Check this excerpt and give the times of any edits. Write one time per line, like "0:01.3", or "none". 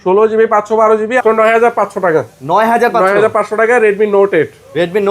0:01.2